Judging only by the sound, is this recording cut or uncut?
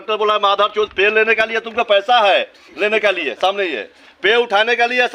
uncut